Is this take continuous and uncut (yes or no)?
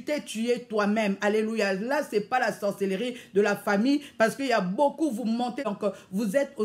no